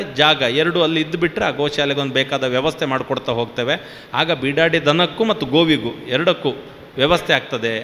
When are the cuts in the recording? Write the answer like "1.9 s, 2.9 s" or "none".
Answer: none